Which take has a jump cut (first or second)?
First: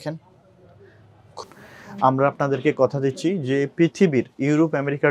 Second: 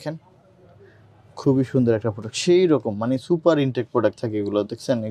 first